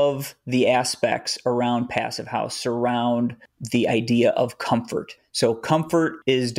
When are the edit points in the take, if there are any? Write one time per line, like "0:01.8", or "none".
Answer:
none